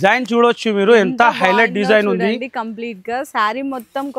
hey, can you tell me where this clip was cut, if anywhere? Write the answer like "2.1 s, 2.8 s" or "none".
none